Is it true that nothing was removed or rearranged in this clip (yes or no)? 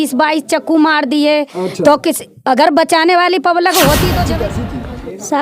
no